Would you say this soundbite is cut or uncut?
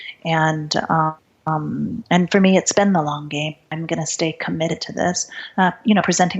cut